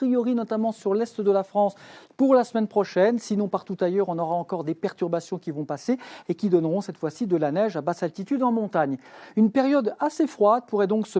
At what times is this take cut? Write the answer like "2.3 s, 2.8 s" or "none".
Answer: 3.6 s